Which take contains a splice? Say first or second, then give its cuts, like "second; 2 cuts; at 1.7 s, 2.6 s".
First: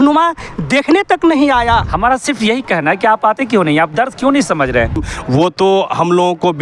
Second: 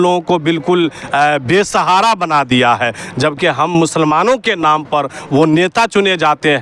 first; 2 cuts; at 1.9 s, 5.1 s